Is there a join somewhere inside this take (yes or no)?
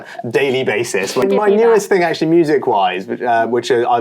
yes